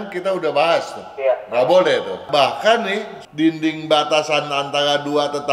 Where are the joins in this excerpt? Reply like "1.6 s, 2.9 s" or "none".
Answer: 2.2 s, 3.1 s